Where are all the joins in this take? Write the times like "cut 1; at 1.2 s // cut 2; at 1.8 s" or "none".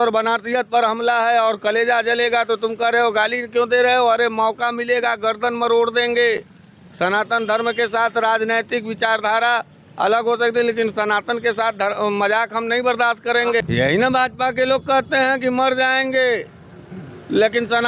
none